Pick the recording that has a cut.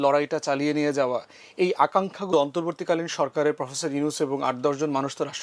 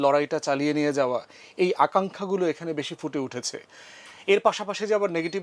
first; 1 cut; at 2.3 s

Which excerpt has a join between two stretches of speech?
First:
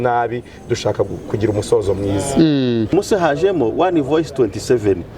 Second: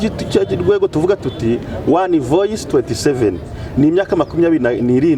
first; 1 cut; at 2.9 s

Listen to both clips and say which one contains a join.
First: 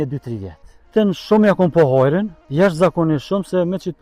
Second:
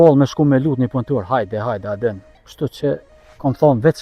first; 2 cuts; at 0.9 s, 2.4 s

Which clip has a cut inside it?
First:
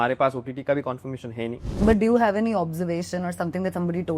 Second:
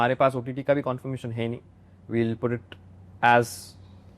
first; 1 cut; at 1.8 s

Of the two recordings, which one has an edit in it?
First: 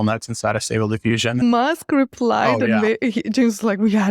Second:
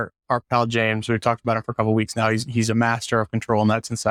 first; 1 cut; at 1.4 s

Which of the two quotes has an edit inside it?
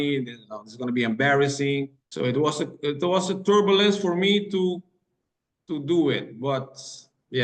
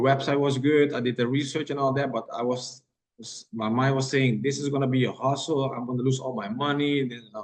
first; 1 cut; at 2.0 s

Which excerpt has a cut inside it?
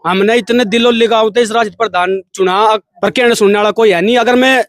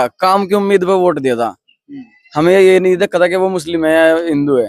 first; 1 cut; at 2.9 s

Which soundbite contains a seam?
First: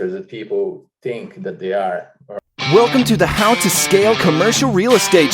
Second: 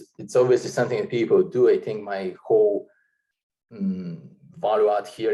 first; 1 cut; at 2.3 s

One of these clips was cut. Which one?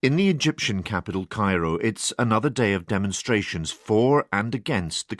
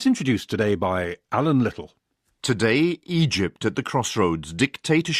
first; 1 cut; at 4.2 s

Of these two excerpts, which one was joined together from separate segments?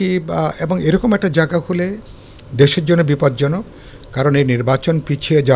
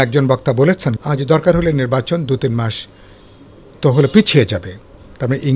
second; 1 cut; at 1.0 s

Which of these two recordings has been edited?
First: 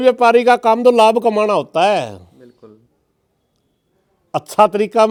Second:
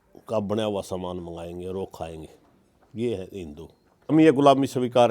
second; 1 cut; at 4.1 s

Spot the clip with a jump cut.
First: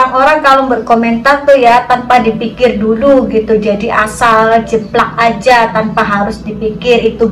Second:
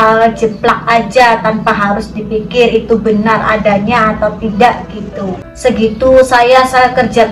second; 1 cut; at 5.4 s

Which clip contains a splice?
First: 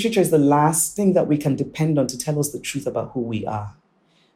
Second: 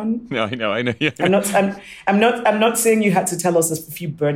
first; 1 cut; at 0.9 s

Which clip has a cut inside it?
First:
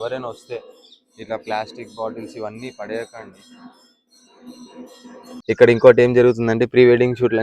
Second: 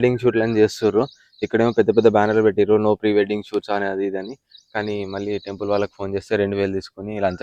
first; 1 cut; at 5.3 s

